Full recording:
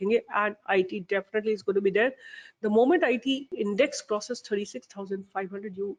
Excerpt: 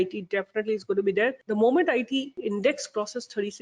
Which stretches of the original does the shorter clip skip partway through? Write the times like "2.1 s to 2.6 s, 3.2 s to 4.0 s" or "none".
2.2 s to 2.5 s

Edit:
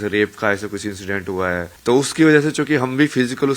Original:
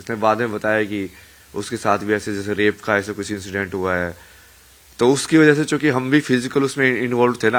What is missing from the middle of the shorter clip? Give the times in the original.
4.2 s to 4.9 s

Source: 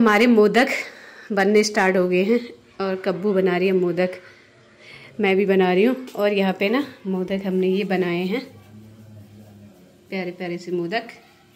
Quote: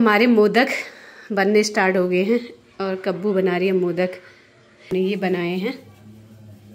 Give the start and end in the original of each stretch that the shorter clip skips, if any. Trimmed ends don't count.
4.9 s to 7.6 s

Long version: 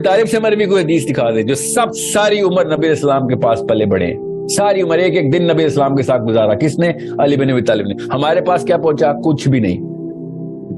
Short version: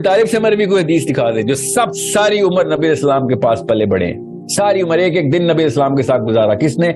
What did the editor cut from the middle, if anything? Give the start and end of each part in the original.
none

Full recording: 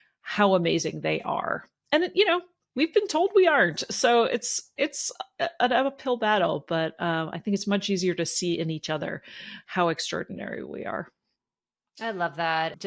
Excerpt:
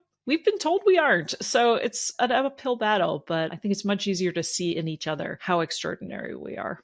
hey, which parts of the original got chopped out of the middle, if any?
4.6 s to 5.5 s, 6.9 s to 7.4 s, 9.2 s to 9.6 s

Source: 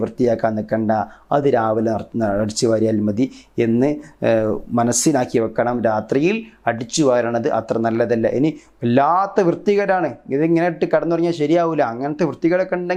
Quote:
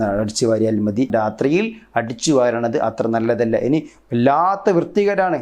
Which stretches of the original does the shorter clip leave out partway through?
3.3 s to 5.8 s

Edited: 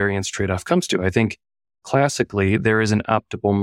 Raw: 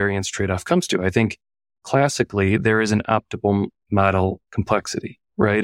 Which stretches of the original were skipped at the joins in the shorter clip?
none

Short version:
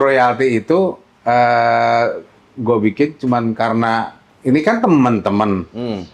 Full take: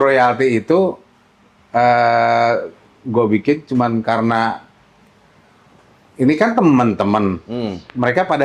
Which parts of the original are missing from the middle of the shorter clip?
1.1 s to 1.6 s, 4.7 s to 6.0 s

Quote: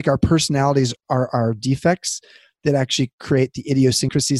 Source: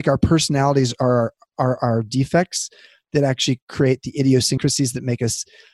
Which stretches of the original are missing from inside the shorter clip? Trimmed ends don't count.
0.9 s to 1.4 s

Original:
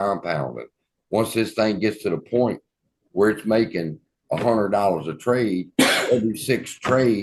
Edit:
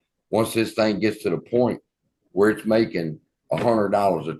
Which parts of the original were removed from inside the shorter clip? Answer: none

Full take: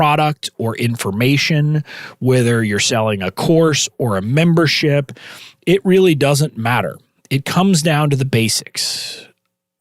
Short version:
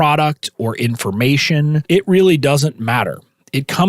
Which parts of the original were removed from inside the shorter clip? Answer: 1.8 s to 5.6 s

